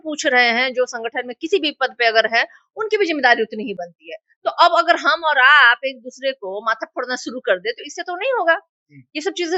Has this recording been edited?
no; 0 cuts

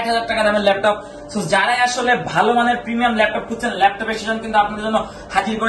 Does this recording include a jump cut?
no; 0 cuts

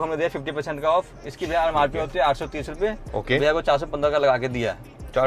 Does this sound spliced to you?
no; 0 cuts

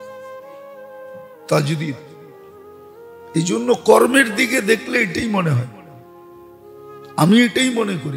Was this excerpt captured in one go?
no; 2 cuts; at 5.7 s, 7.1 s

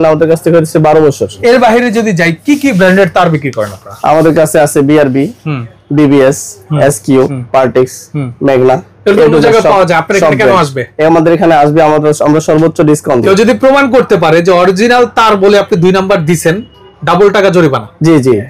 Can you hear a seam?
yes; 3 cuts; at 1.4 s, 7.4 s, 13.3 s

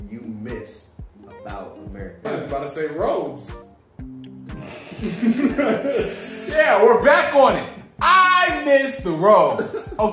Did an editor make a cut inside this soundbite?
yes; 1 cut; at 2.2 s

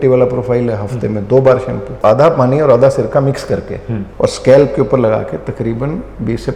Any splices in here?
yes; 2 cuts; at 2.0 s, 3.9 s

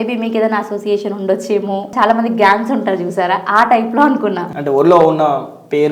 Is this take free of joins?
no; 2 cuts; at 1.9 s, 4.5 s

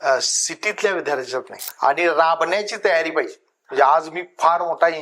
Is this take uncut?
no; 1 cut; at 1.5 s

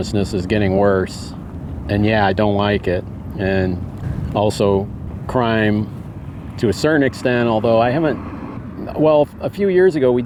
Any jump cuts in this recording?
no; 0 cuts

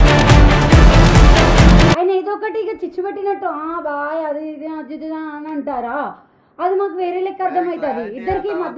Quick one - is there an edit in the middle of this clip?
yes; 1 cut; at 2.0 s

